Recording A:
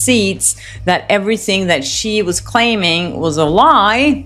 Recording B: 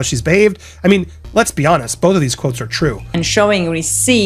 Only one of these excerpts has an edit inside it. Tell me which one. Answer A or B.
B